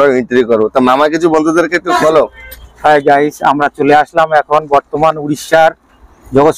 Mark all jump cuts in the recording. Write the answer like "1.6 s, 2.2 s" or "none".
none